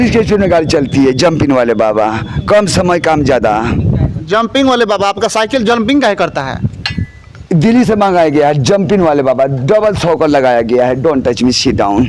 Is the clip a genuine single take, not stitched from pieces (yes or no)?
yes